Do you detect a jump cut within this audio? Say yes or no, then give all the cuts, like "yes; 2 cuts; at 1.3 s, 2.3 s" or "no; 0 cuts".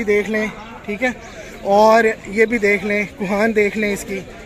no; 0 cuts